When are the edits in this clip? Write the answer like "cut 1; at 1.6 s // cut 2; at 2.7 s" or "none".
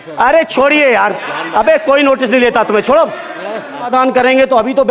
cut 1; at 3.9 s